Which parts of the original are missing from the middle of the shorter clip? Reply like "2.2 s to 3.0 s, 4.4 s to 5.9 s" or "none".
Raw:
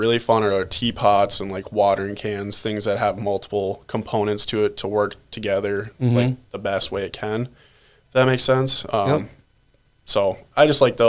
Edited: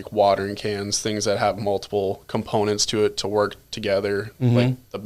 none